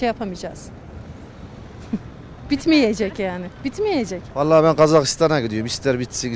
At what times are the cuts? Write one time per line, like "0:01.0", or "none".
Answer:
0:04.2